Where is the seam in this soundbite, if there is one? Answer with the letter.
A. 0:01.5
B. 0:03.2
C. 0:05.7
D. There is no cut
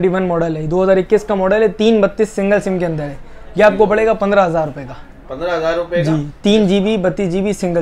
D